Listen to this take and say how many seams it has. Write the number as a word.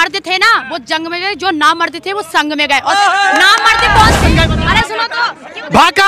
one